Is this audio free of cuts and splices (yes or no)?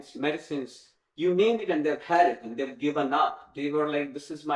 yes